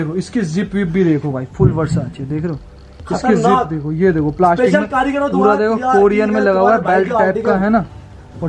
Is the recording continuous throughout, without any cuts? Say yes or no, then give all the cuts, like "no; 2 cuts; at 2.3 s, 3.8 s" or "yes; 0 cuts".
yes; 0 cuts